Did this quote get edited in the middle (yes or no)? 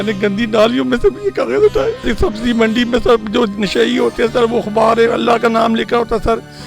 yes